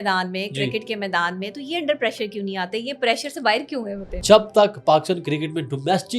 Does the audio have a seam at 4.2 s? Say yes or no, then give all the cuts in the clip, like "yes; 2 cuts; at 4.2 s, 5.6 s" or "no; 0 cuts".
yes; 1 cut; at 4.2 s